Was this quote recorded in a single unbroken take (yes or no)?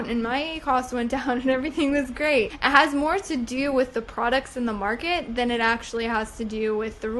yes